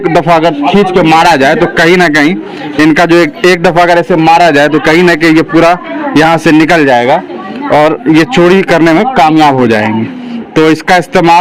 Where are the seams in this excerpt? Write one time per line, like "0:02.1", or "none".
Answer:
none